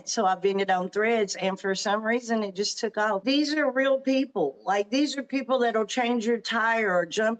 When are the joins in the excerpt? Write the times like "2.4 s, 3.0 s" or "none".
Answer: 3.2 s

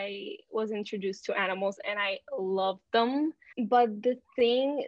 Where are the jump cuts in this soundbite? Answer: 3.5 s

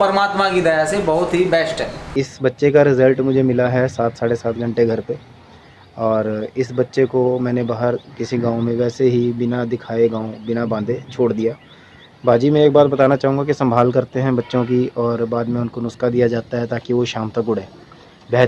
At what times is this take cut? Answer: 2.0 s

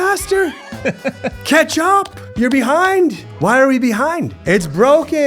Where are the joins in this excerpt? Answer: 2.2 s, 4.4 s

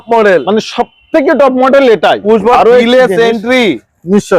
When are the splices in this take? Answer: 2.5 s

